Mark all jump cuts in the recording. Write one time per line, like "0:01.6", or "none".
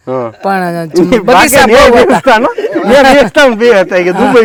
none